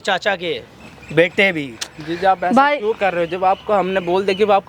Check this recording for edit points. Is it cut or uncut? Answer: uncut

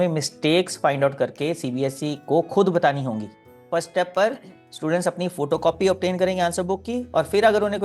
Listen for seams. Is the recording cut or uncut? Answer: cut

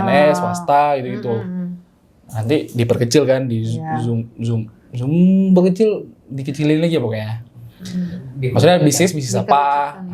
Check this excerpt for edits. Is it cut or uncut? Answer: uncut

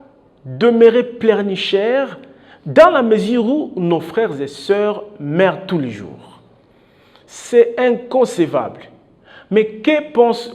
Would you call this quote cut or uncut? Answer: uncut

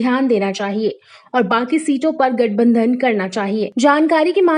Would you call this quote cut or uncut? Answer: cut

